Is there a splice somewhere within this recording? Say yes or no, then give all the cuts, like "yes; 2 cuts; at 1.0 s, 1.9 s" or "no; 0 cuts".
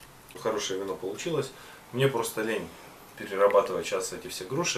no; 0 cuts